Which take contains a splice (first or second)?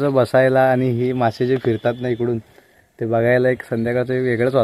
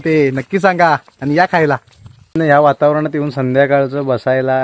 second